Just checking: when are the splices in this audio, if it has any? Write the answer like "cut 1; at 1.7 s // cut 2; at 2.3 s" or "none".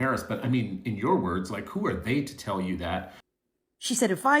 cut 1; at 3.2 s